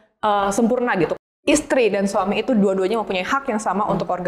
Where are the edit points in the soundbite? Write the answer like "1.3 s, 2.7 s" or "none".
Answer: 1.2 s